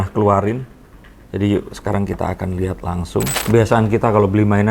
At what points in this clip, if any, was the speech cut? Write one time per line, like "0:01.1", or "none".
0:03.4